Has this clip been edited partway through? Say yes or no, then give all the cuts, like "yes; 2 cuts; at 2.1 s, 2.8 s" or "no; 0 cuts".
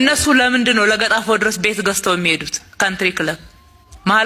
no; 0 cuts